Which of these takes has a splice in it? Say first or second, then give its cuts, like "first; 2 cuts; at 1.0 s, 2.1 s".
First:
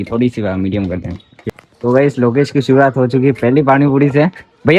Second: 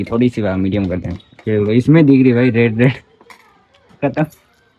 first; 1 cut; at 1.4 s